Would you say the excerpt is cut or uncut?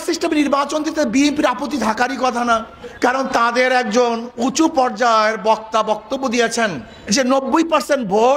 cut